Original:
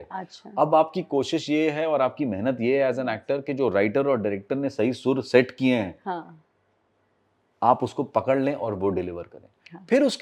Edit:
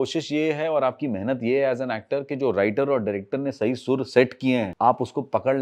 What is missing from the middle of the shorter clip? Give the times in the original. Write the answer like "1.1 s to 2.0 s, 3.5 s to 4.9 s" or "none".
5.9 s to 7.5 s